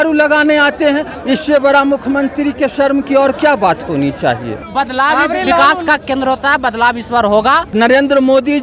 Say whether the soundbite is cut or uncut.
cut